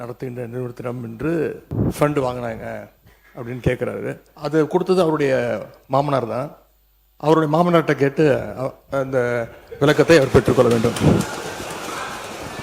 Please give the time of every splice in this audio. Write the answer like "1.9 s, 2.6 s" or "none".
1.6 s, 4.3 s